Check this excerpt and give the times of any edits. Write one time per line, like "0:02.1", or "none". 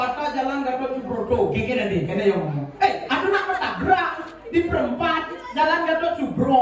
none